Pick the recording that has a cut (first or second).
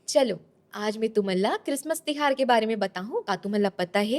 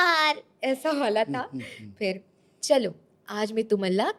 first